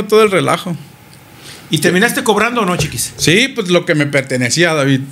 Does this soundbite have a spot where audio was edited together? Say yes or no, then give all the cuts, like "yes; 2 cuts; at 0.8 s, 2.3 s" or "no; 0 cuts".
no; 0 cuts